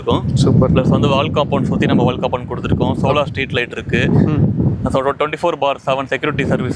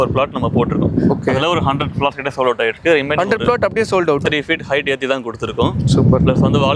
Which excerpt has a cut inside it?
second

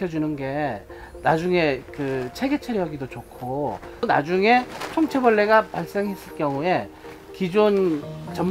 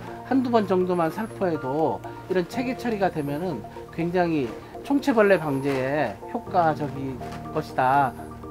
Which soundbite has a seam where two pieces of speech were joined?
first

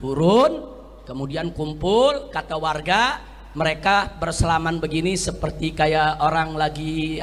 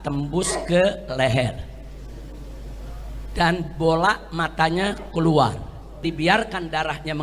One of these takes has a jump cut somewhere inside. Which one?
second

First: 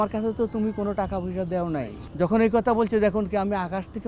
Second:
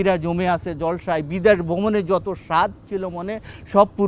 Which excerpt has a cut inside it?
first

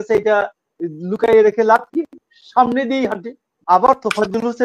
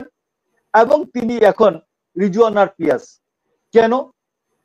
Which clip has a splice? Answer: first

